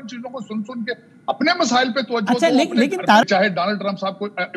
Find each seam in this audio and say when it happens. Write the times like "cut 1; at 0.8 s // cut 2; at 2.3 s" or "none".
cut 1; at 3.2 s